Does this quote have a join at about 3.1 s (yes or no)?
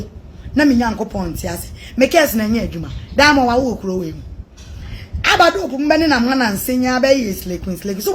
no